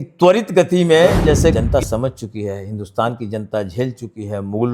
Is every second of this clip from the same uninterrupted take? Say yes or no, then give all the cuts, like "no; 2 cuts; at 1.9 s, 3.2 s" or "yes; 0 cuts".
no; 1 cut; at 1.6 s